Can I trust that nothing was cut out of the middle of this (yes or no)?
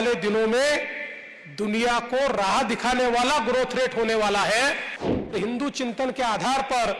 no